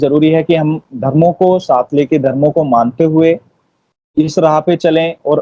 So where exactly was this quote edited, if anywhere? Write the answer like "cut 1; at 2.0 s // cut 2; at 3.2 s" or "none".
none